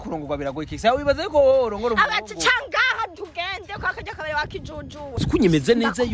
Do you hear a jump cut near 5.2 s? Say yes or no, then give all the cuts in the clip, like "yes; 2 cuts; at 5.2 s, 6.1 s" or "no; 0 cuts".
yes; 1 cut; at 5.2 s